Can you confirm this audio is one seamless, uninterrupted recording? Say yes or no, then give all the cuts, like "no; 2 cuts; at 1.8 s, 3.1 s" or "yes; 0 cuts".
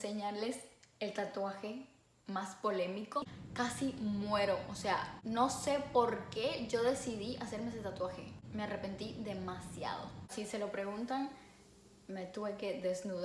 no; 4 cuts; at 3.4 s, 5.1 s, 8.4 s, 10.3 s